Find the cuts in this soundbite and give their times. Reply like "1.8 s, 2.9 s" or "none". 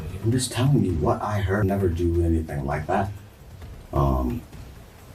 1.6 s